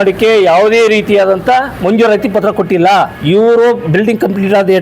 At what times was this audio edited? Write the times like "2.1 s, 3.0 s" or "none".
1.7 s, 3.2 s